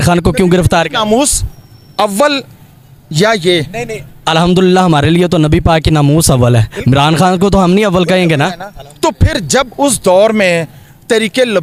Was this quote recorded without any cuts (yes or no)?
yes